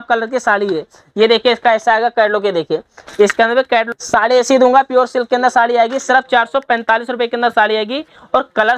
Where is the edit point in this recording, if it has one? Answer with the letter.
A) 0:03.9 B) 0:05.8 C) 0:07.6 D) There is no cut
A